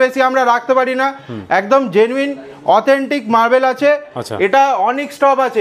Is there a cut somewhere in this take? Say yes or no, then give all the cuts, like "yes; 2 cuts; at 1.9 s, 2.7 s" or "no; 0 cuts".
no; 0 cuts